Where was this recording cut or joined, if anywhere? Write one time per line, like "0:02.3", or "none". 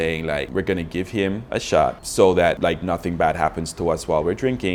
none